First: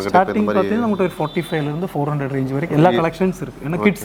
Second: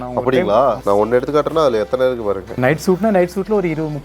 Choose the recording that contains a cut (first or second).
second